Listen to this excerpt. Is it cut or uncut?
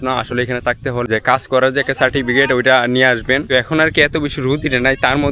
cut